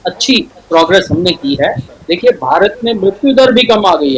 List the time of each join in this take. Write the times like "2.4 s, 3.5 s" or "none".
1.9 s